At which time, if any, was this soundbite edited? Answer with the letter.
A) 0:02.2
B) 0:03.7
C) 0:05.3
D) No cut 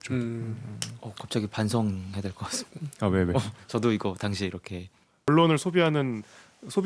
C